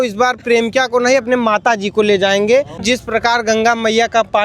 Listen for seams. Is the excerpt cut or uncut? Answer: cut